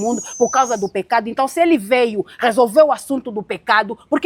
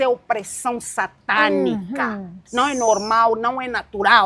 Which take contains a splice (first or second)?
second